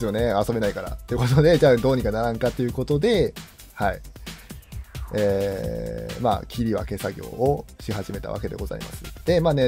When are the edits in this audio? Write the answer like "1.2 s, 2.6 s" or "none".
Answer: none